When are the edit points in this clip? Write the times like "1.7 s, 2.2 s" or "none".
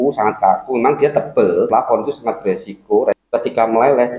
1.7 s, 3.2 s